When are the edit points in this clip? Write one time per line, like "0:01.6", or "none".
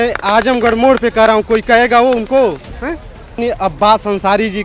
0:03.4